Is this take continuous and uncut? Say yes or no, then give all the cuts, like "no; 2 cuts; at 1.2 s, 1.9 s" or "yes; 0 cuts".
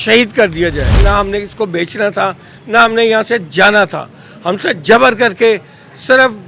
no; 1 cut; at 1.0 s